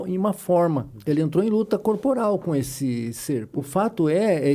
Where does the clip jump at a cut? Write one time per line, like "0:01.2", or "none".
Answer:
0:00.9
0:03.5